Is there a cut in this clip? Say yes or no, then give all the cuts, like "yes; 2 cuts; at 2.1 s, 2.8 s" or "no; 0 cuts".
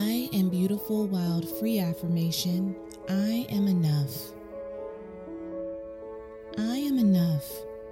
yes; 2 cuts; at 4.7 s, 6.5 s